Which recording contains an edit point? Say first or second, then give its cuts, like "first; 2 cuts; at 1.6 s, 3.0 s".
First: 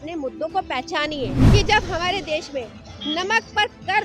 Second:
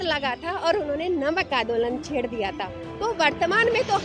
first; 1 cut; at 1.4 s